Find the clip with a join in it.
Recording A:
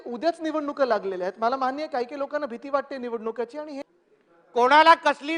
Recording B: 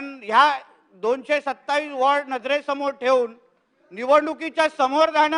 A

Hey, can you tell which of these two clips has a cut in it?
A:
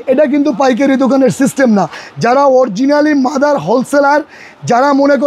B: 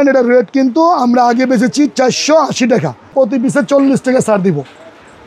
B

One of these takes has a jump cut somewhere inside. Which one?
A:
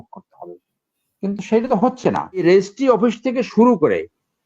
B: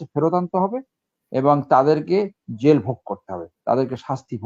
A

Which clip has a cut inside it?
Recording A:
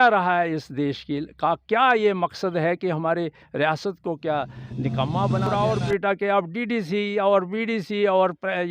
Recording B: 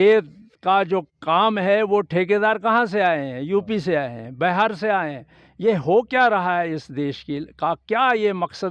A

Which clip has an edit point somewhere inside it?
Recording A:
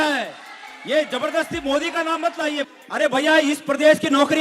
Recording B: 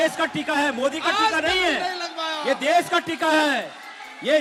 A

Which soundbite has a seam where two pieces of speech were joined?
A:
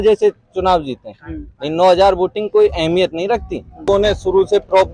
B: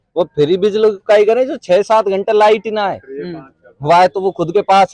A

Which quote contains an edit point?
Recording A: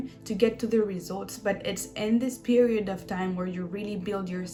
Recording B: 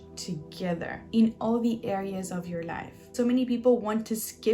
B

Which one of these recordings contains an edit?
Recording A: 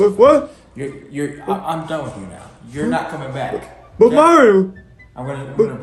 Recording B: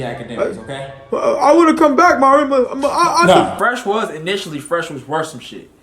B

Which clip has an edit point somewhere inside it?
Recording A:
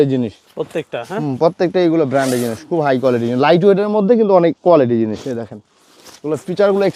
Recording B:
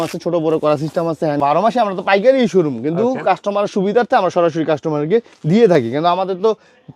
B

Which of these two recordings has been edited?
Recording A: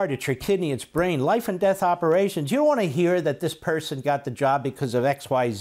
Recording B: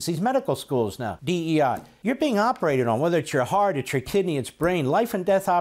B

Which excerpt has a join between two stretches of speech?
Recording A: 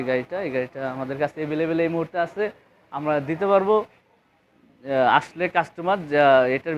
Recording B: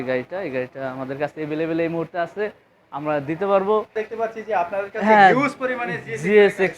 B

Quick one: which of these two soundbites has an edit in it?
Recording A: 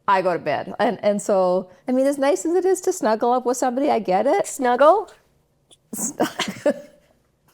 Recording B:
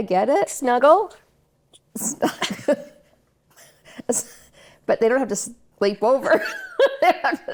A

